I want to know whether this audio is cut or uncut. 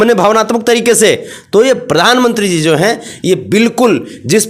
uncut